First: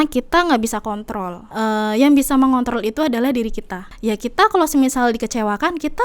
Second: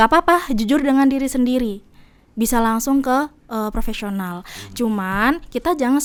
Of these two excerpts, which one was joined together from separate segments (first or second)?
first